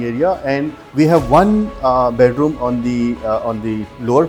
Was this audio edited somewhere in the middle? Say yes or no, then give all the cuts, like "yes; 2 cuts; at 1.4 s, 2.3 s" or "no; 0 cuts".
no; 0 cuts